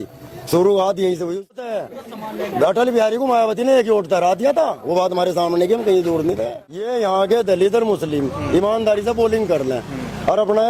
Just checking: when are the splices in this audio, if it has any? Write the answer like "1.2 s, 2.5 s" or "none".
1.7 s, 6.8 s

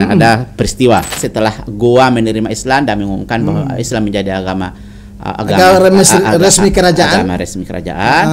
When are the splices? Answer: 1.2 s

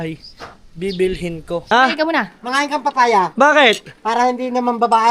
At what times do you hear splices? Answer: 1.6 s

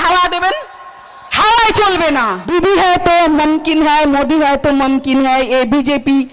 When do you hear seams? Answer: 2.5 s

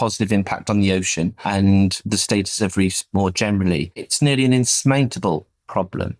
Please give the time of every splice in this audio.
1.4 s, 2.0 s, 4.1 s

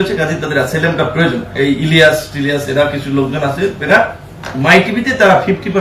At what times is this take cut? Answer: 1.5 s

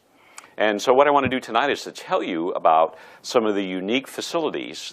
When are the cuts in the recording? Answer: 2.6 s

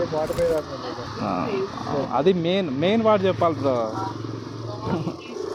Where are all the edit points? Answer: none

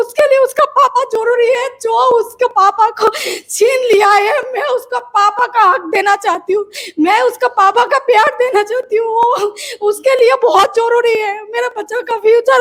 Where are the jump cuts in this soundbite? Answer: none

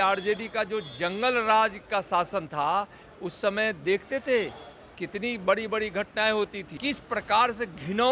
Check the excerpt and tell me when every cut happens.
6.7 s

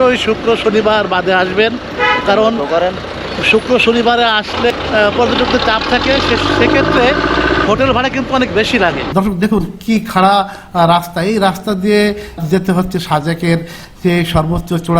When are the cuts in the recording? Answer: 4.7 s, 9.0 s

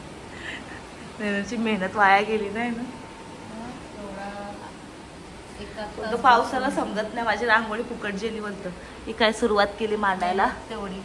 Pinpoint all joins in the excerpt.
none

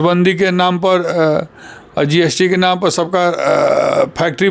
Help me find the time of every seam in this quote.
none

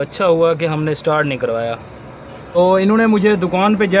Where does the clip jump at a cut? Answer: 2.6 s

